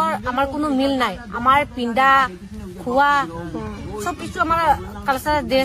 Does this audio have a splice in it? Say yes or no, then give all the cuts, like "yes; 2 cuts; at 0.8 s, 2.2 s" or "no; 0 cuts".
no; 0 cuts